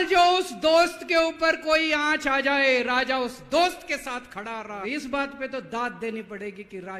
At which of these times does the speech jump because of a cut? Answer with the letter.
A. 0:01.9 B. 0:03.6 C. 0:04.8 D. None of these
C